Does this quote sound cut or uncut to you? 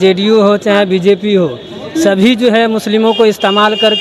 uncut